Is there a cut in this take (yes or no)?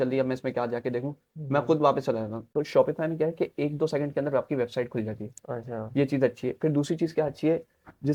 no